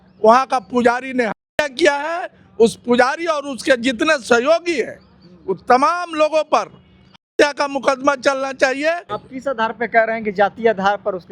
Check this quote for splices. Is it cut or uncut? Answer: cut